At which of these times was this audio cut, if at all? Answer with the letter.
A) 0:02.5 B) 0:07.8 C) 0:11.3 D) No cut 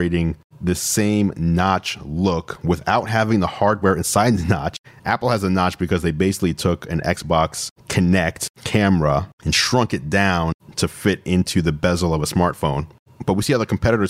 D